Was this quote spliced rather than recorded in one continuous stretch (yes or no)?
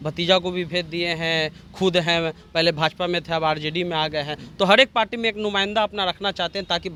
no